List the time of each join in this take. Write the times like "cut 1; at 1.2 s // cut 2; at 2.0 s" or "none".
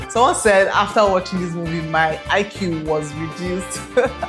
none